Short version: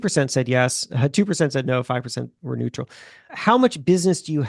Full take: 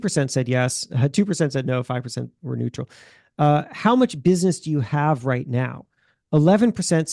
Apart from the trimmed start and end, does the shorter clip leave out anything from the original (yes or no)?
yes